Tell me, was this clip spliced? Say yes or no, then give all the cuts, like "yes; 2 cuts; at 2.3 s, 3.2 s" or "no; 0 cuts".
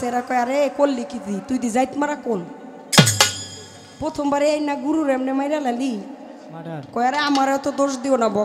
no; 0 cuts